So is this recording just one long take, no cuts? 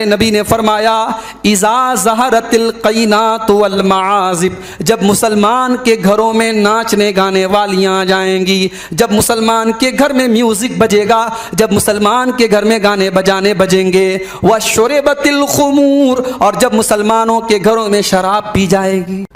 yes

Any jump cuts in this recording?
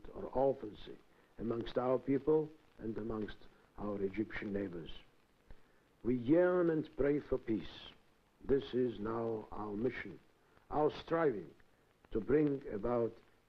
no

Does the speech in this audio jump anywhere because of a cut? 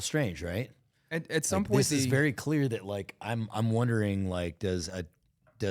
no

